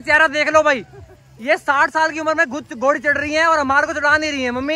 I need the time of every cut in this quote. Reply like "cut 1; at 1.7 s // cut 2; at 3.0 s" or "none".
none